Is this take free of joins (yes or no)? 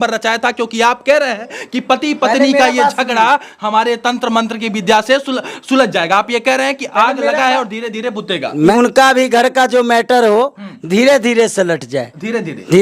no